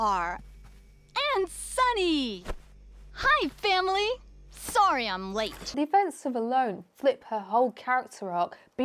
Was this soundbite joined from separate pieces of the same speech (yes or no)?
yes